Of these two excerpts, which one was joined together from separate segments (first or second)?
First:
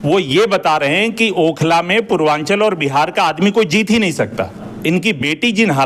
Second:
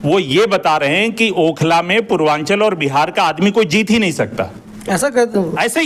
first